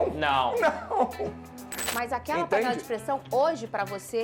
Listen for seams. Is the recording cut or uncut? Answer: cut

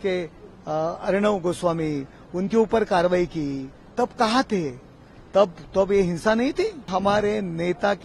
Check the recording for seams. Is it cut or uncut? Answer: cut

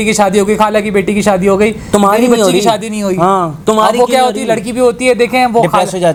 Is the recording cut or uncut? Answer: uncut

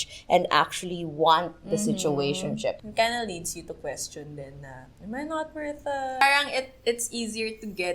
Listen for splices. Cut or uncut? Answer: cut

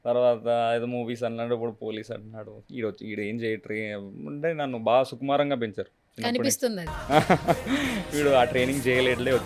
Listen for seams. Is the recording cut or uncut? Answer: uncut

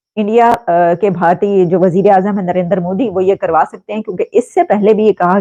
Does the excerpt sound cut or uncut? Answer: uncut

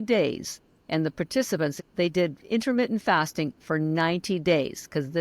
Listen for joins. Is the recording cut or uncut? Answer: cut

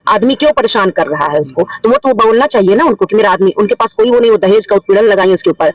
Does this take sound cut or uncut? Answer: uncut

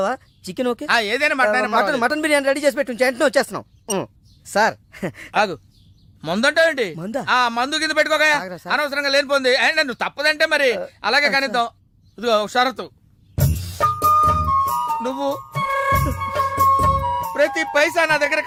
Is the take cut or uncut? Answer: uncut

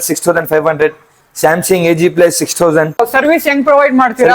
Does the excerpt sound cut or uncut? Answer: cut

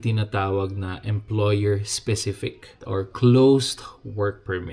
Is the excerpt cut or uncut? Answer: cut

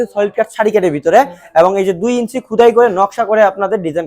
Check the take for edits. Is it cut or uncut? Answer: uncut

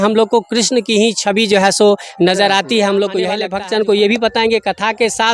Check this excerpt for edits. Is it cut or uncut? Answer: cut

